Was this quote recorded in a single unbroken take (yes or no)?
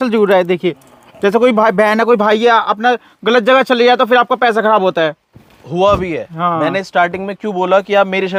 yes